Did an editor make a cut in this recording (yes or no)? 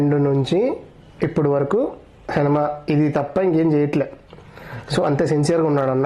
no